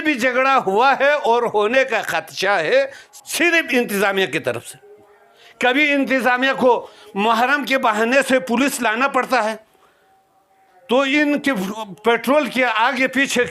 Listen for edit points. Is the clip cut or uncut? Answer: cut